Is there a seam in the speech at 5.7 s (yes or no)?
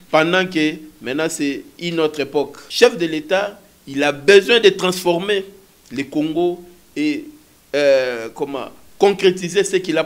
no